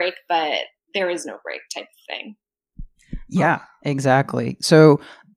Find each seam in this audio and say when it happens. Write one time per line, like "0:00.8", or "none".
none